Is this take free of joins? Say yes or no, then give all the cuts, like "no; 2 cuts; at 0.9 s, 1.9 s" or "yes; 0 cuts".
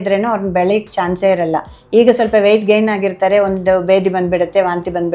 yes; 0 cuts